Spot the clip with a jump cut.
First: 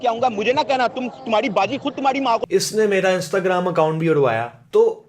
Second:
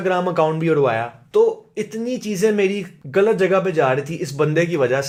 first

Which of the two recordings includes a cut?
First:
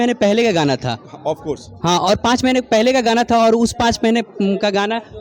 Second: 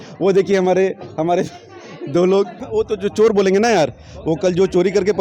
second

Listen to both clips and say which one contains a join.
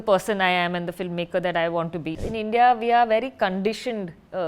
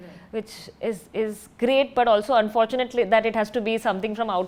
first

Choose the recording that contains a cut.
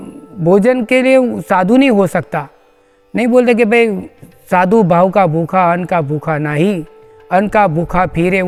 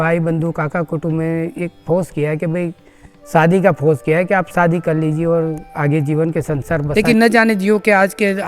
second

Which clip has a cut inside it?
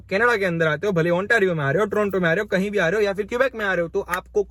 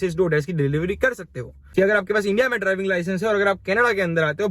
second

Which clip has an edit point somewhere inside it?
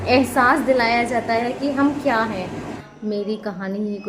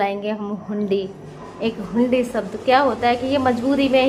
first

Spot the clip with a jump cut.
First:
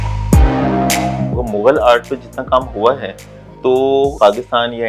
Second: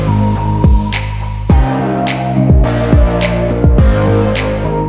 first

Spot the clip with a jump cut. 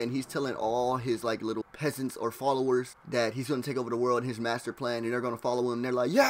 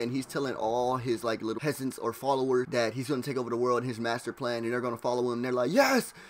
second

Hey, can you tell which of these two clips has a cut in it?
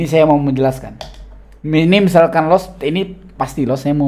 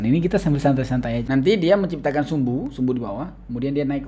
second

